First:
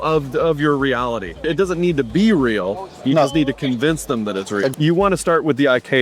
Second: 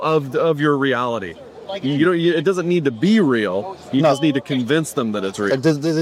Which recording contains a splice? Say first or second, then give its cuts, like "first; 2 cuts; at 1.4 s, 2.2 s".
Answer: first; 2 cuts; at 1.5 s, 4.7 s